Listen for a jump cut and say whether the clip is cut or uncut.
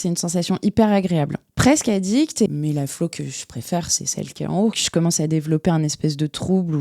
cut